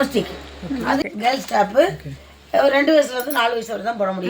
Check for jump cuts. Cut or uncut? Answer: cut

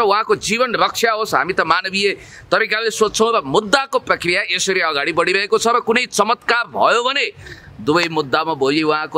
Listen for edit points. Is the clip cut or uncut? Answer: uncut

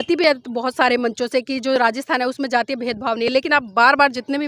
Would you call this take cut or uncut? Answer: uncut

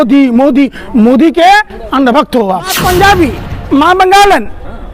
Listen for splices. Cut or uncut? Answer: cut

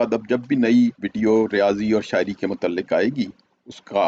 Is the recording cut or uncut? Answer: cut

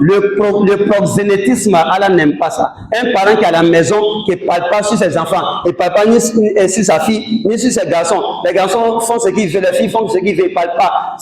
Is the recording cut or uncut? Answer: uncut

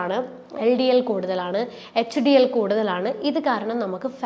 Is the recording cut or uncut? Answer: uncut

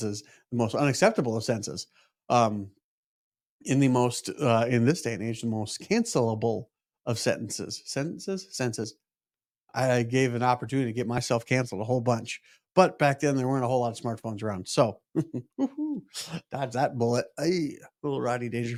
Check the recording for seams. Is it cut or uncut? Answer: uncut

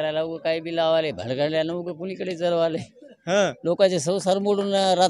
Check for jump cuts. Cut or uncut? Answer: uncut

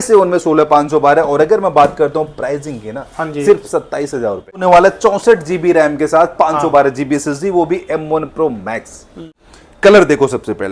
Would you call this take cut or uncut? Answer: cut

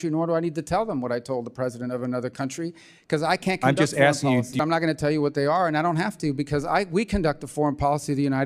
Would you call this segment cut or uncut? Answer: cut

